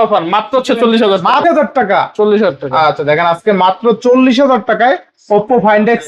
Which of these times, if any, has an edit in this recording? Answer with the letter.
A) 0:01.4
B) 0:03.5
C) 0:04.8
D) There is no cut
A